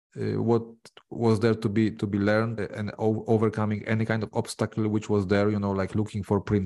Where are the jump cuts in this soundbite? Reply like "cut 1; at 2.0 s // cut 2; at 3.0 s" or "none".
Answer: cut 1; at 2.6 s